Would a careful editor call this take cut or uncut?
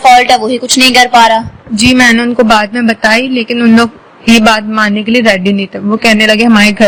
uncut